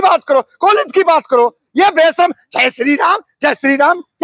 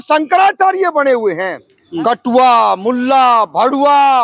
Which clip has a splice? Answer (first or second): second